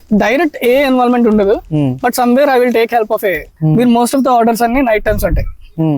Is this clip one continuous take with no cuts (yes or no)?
no